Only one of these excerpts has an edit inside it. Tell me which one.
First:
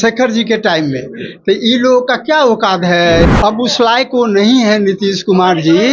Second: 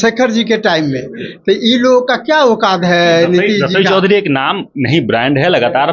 first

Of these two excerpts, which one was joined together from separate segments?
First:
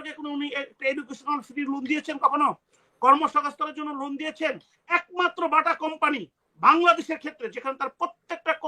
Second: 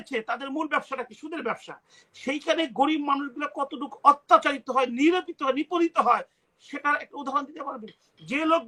first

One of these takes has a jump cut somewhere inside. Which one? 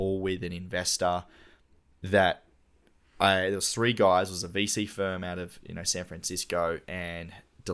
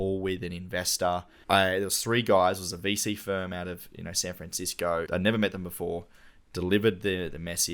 second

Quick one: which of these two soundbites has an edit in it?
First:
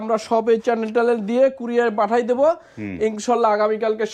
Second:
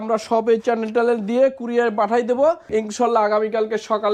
second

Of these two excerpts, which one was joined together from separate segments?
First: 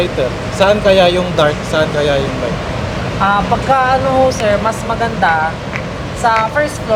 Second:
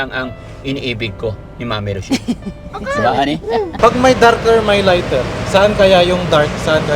second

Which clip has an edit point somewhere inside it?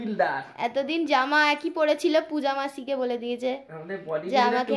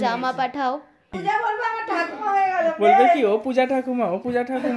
second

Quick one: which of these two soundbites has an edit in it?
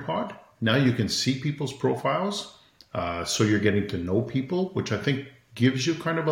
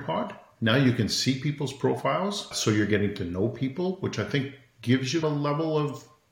second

